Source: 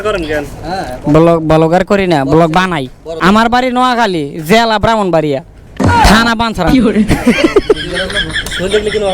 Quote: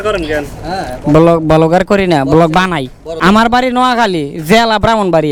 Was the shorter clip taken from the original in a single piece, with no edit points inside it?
yes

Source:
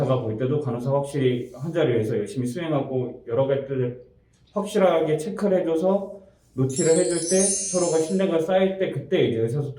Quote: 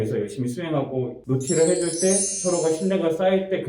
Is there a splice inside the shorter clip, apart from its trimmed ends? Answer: yes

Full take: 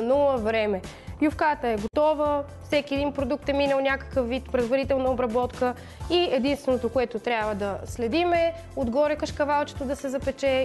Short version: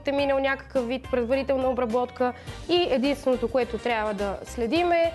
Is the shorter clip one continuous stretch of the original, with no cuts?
yes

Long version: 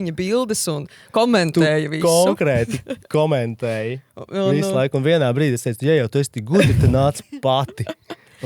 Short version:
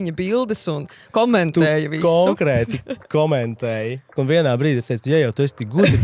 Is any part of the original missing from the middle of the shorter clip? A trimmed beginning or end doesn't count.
yes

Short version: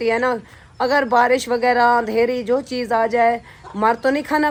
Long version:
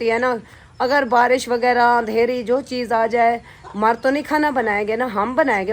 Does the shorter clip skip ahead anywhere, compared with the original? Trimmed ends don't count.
no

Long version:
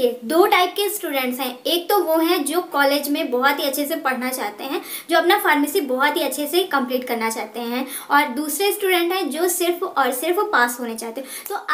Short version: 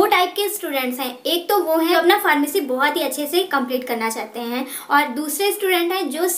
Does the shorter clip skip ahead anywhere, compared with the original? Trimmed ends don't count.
yes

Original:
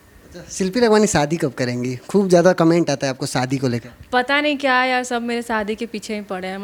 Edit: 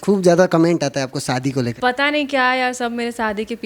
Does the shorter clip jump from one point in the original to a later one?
yes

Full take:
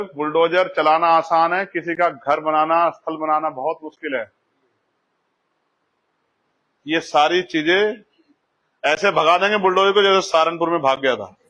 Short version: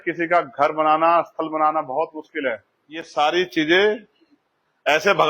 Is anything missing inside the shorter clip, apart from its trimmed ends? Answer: yes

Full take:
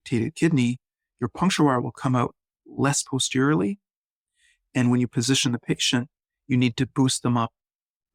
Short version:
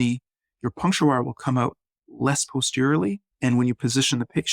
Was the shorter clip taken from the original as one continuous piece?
no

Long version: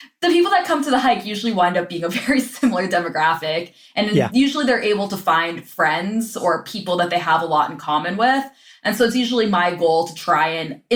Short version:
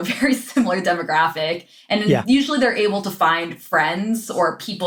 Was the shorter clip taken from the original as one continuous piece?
yes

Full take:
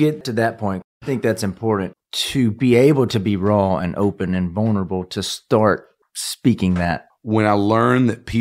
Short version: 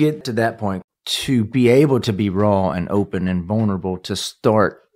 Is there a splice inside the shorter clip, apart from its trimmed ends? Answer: yes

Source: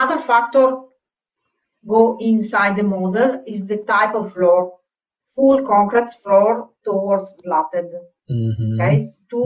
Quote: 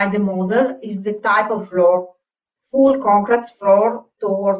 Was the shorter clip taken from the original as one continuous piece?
yes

